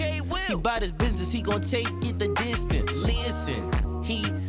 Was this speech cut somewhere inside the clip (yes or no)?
no